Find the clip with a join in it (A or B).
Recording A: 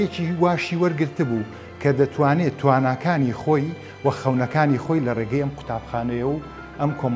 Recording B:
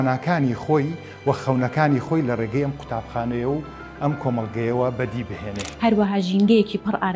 B